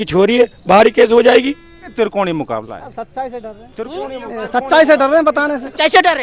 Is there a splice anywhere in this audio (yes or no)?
yes